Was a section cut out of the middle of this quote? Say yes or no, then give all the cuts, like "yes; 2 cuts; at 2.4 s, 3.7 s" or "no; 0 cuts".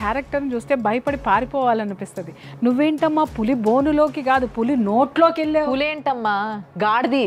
no; 0 cuts